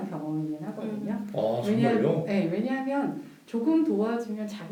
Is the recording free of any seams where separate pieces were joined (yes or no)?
yes